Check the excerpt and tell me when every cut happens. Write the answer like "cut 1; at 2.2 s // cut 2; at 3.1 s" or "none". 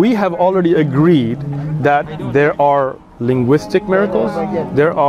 none